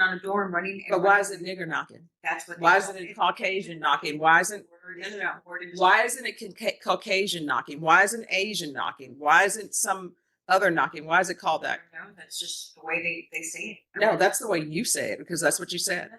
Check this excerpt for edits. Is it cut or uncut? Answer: cut